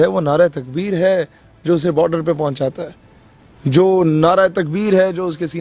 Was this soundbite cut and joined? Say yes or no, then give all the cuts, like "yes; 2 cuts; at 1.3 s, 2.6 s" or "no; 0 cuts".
no; 0 cuts